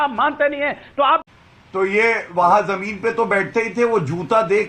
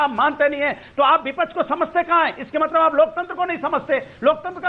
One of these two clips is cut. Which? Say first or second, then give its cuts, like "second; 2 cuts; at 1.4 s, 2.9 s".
first; 1 cut; at 1.3 s